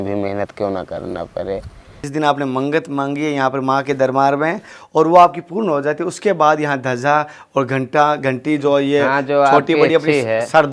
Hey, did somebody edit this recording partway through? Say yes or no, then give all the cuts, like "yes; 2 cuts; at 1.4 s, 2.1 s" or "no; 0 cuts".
yes; 1 cut; at 2.0 s